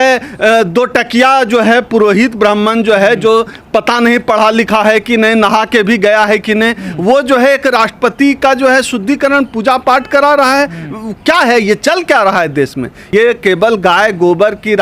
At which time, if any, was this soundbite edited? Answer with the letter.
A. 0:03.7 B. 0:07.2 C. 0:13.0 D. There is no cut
C